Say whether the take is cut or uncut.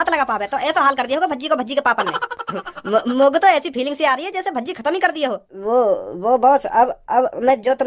cut